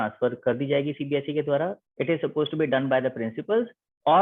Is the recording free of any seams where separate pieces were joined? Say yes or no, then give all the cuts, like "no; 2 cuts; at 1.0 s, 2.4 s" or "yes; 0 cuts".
no; 1 cut; at 1.6 s